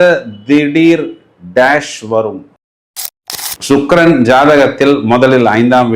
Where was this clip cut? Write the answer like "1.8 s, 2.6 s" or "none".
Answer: 3.0 s